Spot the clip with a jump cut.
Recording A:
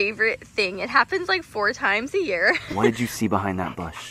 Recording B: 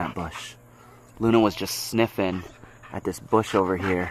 A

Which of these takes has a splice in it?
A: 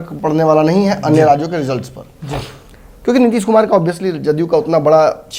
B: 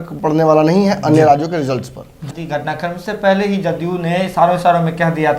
B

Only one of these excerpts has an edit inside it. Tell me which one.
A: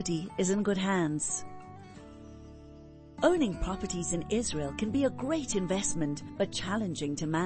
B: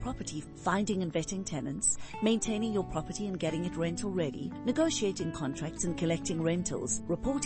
A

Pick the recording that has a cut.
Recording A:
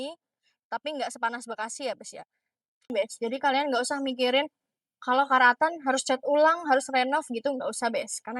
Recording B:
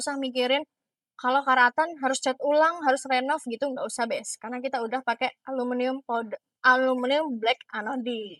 A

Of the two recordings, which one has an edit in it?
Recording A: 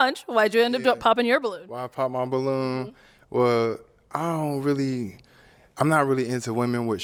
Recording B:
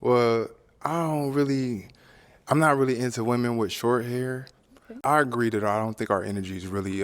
B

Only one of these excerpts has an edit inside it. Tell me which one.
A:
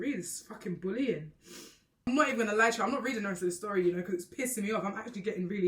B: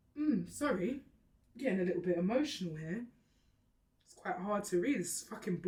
A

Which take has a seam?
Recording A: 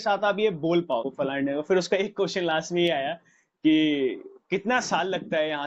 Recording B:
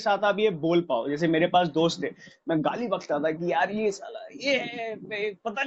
A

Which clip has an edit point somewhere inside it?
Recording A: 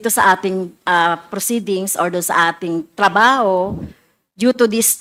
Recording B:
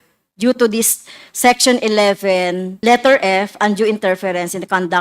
B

